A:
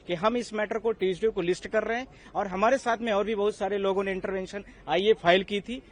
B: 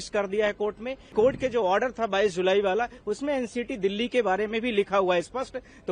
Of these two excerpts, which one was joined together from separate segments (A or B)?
B